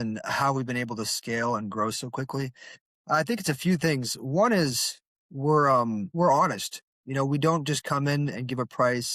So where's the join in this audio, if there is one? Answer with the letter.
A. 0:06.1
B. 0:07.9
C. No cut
A